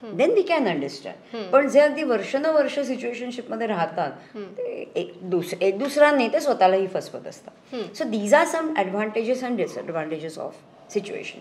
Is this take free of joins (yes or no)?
yes